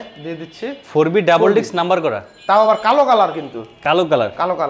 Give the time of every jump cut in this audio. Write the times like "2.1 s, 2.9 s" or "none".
none